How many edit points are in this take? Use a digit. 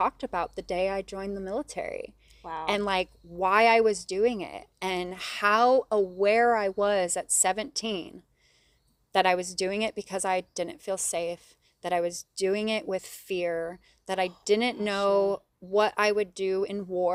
0